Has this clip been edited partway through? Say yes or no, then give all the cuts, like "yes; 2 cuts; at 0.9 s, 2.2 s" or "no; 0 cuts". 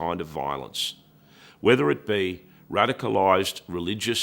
no; 0 cuts